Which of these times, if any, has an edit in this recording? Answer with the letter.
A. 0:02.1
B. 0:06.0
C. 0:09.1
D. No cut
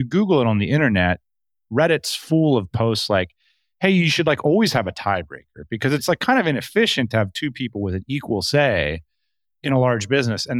B